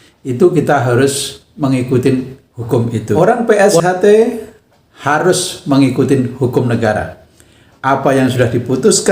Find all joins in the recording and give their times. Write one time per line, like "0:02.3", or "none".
0:03.2